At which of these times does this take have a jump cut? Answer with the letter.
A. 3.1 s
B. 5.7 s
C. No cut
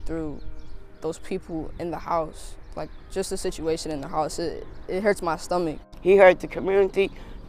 B